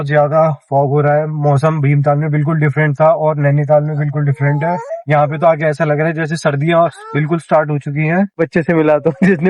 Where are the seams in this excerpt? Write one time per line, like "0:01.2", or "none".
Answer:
0:04.9
0:08.3